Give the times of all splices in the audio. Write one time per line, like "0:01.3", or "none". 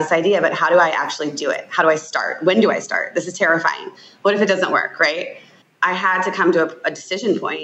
none